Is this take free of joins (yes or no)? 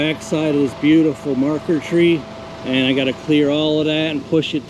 yes